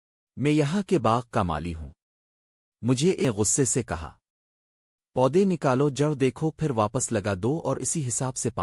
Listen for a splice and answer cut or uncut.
cut